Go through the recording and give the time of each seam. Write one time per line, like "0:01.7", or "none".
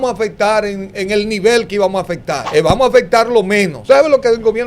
0:02.3
0:03.8